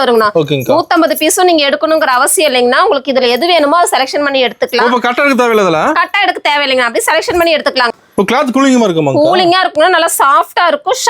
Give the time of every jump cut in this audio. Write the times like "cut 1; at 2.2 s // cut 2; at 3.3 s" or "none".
cut 1; at 7.9 s